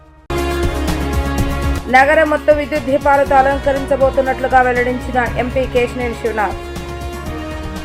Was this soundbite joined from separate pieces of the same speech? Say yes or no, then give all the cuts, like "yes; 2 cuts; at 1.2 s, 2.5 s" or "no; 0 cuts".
no; 0 cuts